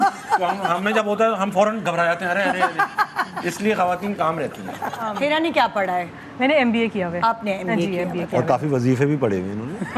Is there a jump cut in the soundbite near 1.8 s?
no; 1 cut; at 5.1 s

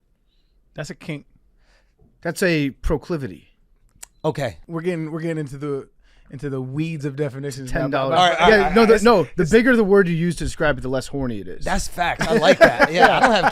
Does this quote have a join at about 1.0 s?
no; 1 cut; at 4.6 s

